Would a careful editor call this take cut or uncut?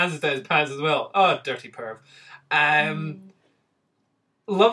uncut